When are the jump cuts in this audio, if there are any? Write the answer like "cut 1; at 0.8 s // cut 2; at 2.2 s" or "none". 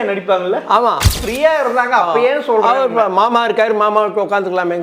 cut 1; at 1.2 s